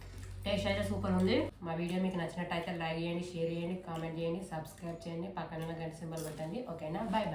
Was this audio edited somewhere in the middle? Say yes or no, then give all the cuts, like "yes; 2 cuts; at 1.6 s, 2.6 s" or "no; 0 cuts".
yes; 1 cut; at 1.6 s